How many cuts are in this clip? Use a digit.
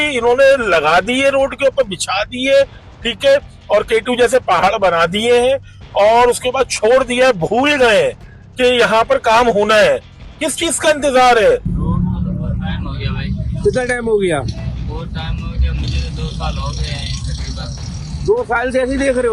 1